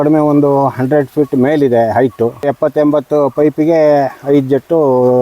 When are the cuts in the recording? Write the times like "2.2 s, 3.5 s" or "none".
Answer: 2.5 s